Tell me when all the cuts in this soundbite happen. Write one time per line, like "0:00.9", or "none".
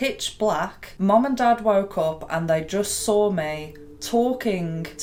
none